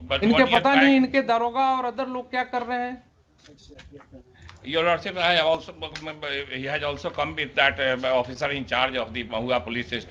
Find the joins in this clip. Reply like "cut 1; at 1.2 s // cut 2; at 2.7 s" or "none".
none

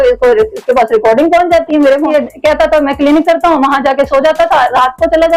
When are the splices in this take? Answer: cut 1; at 2.1 s

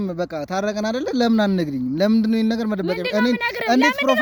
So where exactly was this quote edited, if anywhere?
none

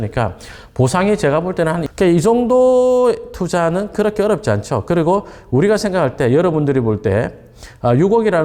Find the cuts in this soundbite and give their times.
cut 1; at 1.8 s

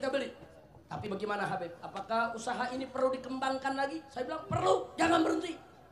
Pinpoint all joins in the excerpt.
cut 1; at 1.0 s

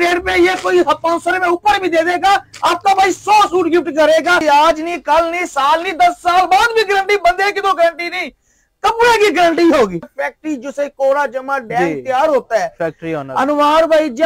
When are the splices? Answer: cut 1; at 4.4 s // cut 2; at 10.0 s

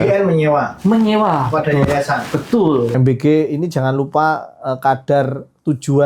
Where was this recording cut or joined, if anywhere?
cut 1; at 3.0 s

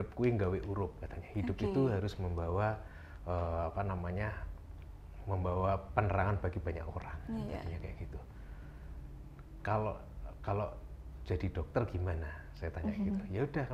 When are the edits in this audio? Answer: none

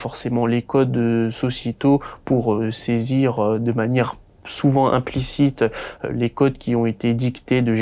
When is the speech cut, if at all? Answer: none

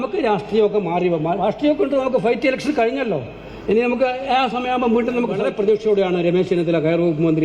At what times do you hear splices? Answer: cut 1; at 5.4 s

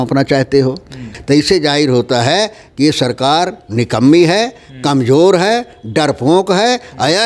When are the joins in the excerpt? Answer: cut 1; at 1.1 s

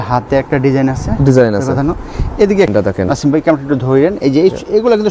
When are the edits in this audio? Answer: cut 1; at 2.7 s

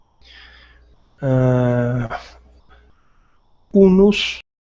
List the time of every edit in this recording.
cut 1; at 1.3 s

